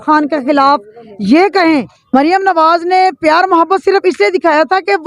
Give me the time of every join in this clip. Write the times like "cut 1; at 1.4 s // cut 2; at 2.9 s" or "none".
cut 1; at 2.1 s